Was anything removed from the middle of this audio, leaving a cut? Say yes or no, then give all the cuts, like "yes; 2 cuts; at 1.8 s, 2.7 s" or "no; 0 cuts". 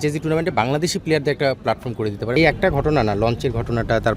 yes; 1 cut; at 2.4 s